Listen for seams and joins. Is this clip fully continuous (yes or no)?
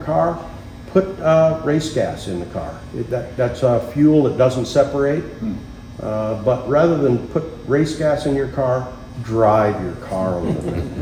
yes